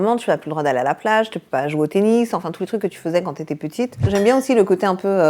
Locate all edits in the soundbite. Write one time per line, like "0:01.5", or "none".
0:04.1